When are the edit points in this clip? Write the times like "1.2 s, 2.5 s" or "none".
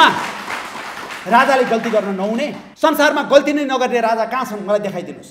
2.6 s